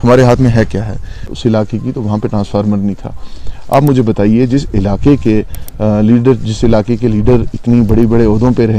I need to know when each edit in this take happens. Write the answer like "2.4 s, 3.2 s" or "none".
1.2 s